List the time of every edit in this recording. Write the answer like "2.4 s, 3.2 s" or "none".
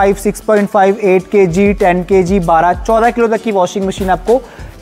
none